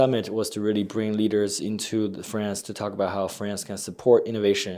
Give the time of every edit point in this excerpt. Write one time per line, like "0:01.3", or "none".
none